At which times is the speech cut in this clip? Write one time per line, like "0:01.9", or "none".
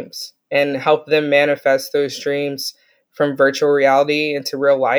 none